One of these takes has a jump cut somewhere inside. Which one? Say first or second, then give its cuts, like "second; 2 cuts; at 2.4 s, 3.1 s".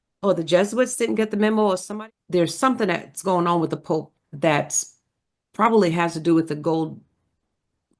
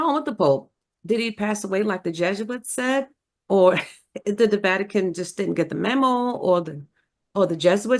first; 1 cut; at 1.9 s